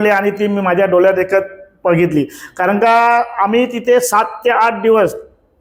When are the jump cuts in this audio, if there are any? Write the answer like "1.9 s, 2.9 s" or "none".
none